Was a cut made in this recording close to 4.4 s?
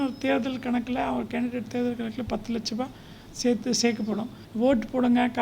yes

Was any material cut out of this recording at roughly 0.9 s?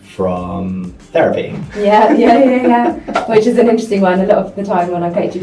yes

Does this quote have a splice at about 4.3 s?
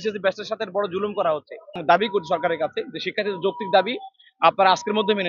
no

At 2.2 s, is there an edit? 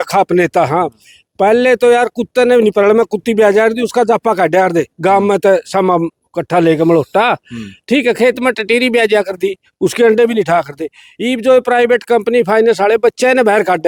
no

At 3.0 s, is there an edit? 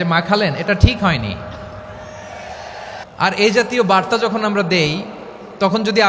yes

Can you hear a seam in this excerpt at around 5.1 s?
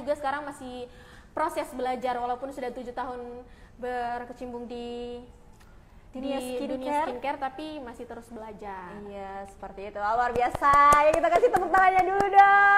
no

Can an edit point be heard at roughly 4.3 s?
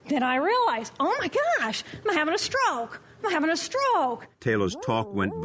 yes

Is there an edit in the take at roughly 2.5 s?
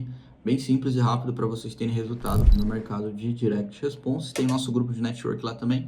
yes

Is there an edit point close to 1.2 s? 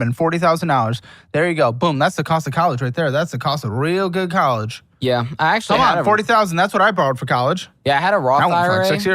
no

